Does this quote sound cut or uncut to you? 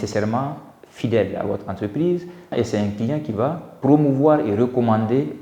cut